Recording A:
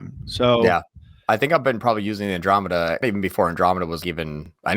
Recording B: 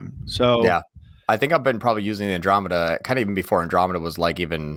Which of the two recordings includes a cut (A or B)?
A